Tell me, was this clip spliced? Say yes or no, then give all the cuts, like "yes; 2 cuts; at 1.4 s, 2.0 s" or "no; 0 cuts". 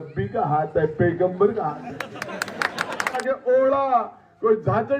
yes; 1 cut; at 3.2 s